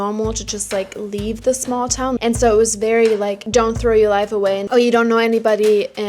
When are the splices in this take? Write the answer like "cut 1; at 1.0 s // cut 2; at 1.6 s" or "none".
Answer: cut 1; at 2.2 s // cut 2; at 3.4 s